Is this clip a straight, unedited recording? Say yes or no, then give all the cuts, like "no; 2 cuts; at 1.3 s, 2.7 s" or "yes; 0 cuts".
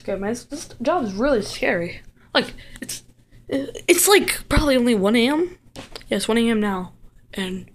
yes; 0 cuts